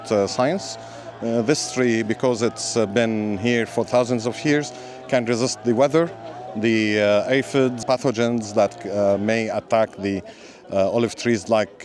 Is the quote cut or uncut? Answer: cut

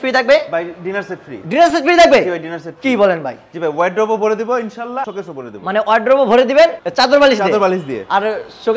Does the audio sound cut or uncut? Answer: uncut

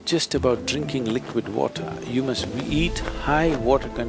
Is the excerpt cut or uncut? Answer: uncut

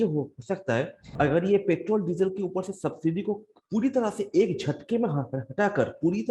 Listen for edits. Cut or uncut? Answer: cut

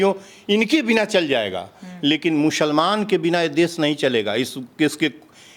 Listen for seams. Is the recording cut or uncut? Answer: uncut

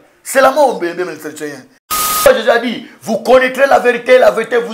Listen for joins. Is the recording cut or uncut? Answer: cut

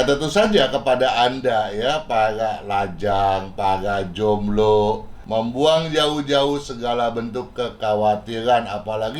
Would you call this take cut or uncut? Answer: cut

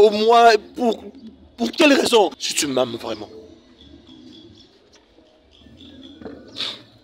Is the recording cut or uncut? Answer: cut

